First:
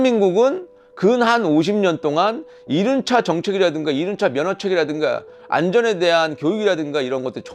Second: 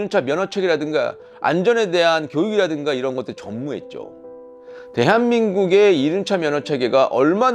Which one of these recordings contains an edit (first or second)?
second